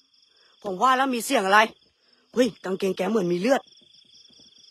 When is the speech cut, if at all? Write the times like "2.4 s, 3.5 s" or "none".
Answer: none